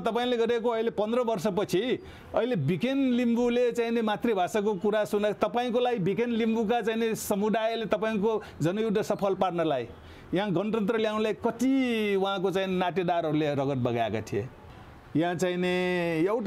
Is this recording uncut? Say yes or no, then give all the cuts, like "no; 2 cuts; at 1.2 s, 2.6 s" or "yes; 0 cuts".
no; 1 cut; at 14.6 s